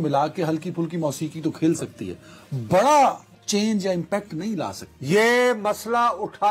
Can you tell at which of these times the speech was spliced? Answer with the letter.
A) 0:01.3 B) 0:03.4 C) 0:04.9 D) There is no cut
C